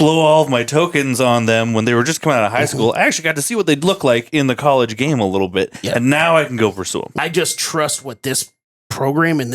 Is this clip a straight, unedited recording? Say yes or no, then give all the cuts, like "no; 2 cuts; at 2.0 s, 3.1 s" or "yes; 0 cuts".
no; 1 cut; at 7.2 s